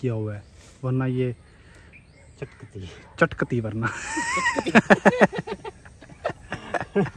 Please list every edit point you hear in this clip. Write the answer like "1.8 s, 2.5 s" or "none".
none